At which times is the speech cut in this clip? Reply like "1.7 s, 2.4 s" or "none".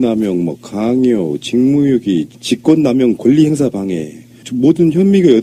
none